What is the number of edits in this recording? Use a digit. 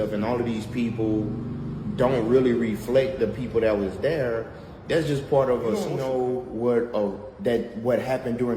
1